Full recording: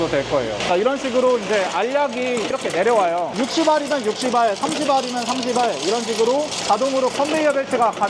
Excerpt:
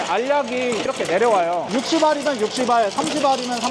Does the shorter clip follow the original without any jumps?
yes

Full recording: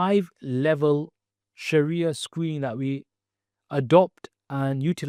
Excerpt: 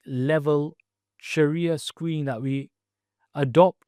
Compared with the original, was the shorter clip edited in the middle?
no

